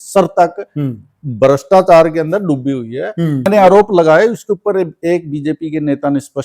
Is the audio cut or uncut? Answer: cut